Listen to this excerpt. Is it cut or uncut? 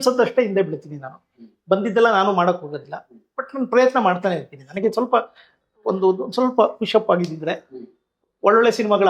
uncut